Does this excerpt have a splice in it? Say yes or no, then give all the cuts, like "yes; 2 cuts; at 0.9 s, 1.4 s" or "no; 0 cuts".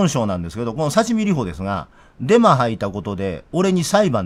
no; 0 cuts